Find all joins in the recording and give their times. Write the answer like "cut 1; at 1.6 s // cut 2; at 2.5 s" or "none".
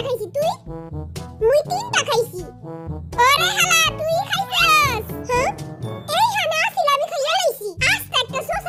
none